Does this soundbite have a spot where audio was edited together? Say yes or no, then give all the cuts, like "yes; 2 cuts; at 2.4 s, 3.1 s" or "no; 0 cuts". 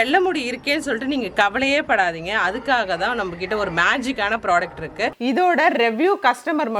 yes; 1 cut; at 5.2 s